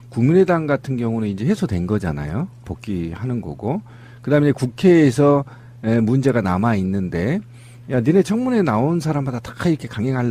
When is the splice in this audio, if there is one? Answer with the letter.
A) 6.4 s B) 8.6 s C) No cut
C